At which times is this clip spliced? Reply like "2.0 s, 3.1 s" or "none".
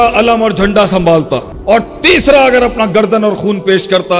1.5 s

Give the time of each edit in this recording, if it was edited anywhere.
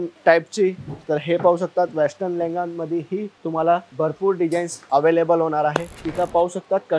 6.0 s

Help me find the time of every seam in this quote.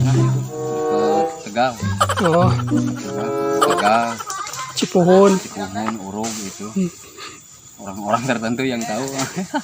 none

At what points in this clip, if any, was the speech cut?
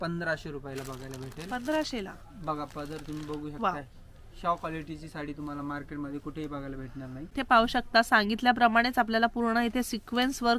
7.3 s

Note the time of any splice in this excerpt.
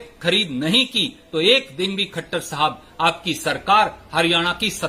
none

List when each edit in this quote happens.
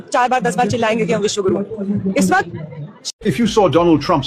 3.1 s

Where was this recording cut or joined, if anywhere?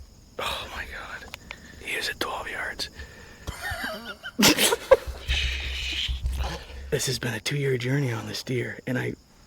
1.7 s, 6.8 s

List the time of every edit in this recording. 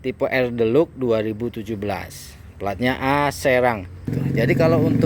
4.0 s

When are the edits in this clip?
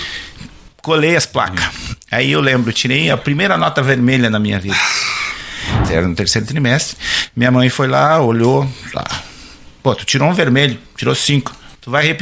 5.8 s

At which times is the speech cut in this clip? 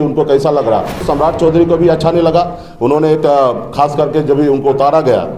1.0 s

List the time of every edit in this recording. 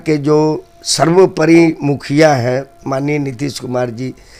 none

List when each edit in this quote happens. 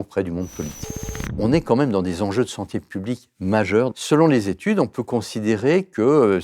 1.4 s, 3.9 s

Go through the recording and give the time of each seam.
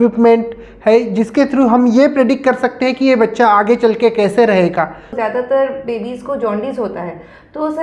5.1 s

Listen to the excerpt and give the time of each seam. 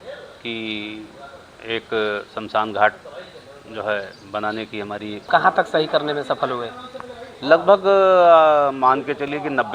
5.3 s

